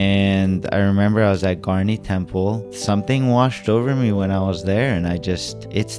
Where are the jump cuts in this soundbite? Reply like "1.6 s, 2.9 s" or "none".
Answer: 2.7 s